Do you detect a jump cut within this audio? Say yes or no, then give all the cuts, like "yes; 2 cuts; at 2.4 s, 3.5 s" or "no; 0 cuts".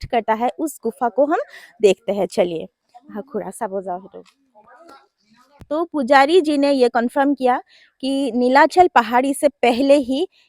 yes; 1 cut; at 5.5 s